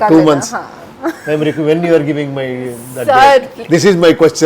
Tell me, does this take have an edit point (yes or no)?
no